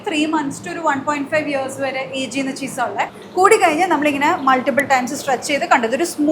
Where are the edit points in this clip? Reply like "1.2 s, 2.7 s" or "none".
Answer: 3.2 s